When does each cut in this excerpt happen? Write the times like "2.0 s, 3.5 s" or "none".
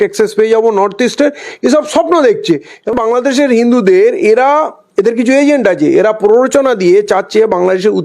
3.0 s